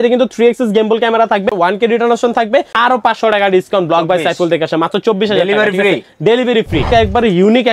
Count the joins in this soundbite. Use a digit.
3